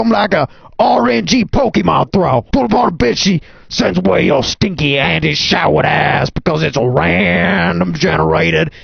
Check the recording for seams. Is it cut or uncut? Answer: uncut